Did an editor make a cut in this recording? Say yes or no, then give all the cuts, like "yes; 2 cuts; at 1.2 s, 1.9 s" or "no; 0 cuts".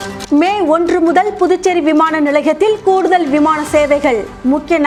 no; 0 cuts